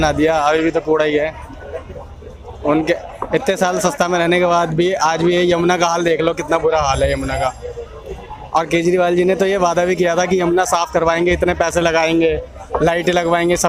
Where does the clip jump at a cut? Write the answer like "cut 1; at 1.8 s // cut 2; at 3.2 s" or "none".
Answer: none